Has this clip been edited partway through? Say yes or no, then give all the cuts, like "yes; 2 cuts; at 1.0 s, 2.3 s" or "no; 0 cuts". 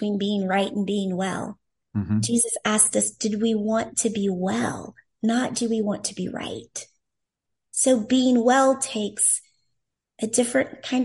yes; 1 cut; at 7.4 s